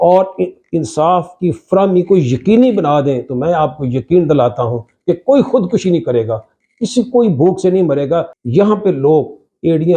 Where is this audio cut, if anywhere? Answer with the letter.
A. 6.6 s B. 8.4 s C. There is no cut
B